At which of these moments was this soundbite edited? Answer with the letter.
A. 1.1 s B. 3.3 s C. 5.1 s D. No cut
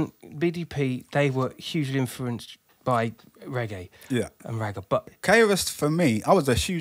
C